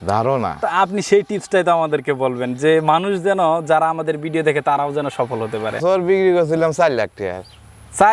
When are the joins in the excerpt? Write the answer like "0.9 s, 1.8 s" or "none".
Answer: 5.8 s